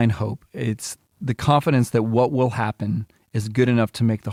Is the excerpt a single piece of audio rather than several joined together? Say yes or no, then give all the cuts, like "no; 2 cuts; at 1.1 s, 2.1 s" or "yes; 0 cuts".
yes; 0 cuts